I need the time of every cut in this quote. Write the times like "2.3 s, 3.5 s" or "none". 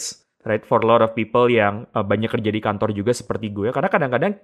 none

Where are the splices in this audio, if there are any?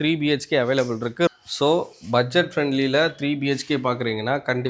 1.3 s

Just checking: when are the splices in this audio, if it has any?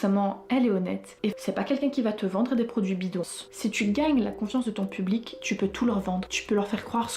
1.3 s, 3.3 s

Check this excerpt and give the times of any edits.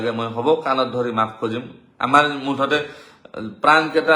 none

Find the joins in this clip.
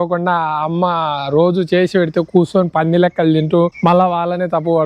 3.7 s

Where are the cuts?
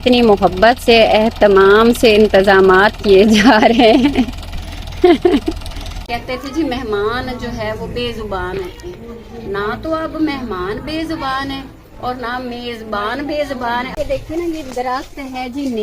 6.0 s, 13.9 s

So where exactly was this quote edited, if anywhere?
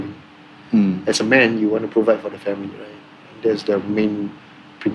none

